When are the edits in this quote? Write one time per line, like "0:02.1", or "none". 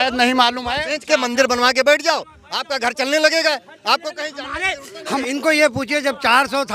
0:05.2